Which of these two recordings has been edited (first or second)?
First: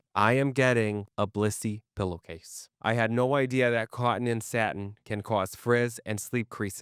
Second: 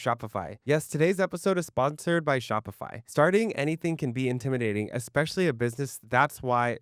first